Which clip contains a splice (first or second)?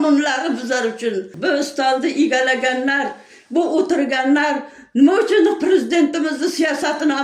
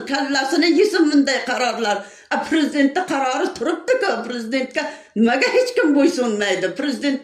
first